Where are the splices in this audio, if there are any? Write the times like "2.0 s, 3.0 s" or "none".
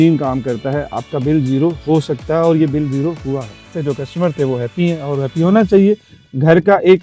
3.7 s